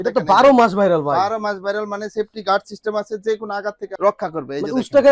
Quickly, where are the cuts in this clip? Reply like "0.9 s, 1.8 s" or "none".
none